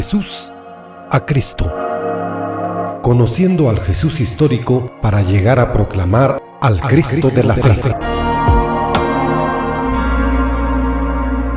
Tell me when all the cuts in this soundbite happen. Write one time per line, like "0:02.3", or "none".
none